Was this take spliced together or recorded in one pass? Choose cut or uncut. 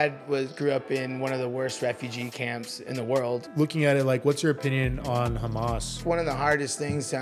cut